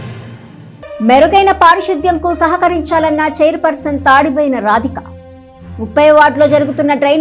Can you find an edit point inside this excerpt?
yes; 1 cut; at 1.0 s

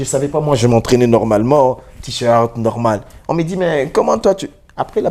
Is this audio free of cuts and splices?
yes; 0 cuts

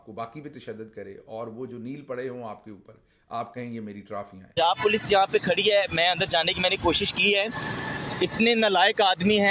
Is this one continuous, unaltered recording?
no; 1 cut; at 4.5 s

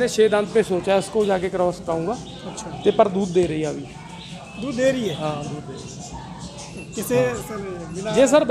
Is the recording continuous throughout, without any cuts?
yes; 0 cuts

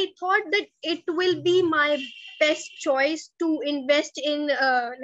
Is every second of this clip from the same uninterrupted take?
yes; 0 cuts

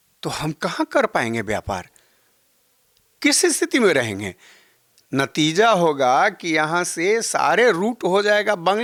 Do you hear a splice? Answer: no; 0 cuts

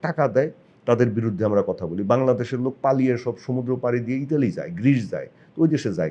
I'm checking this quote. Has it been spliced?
no; 0 cuts

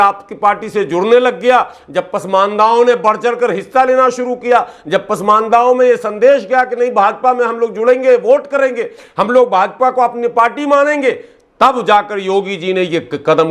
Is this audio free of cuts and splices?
yes; 0 cuts

